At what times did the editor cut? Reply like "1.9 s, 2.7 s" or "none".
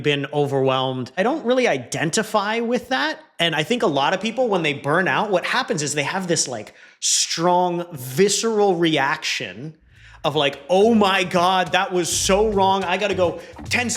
1.2 s

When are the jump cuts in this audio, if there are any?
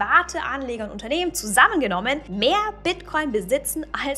2.3 s

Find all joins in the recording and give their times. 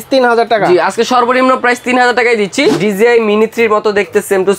2.8 s

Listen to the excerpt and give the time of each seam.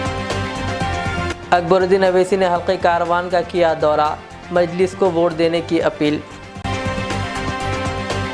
none

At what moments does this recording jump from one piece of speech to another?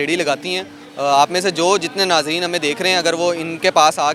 none

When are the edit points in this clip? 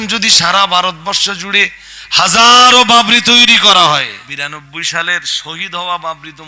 4.2 s

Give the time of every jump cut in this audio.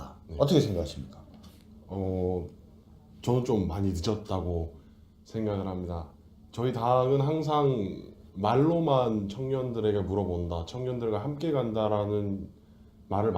5.0 s

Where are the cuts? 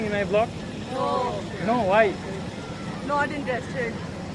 2.2 s

